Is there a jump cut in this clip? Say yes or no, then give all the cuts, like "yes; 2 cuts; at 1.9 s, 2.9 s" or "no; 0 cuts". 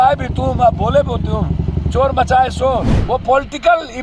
yes; 1 cut; at 2.9 s